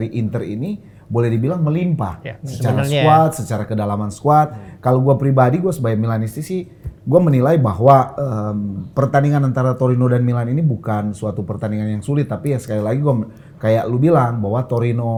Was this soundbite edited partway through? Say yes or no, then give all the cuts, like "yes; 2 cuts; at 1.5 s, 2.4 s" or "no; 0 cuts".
no; 0 cuts